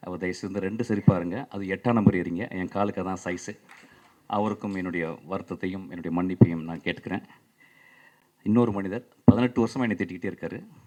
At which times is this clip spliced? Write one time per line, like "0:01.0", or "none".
none